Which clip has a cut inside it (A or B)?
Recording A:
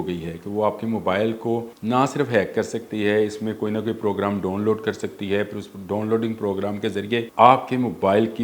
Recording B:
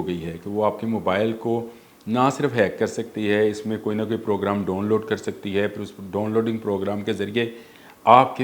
A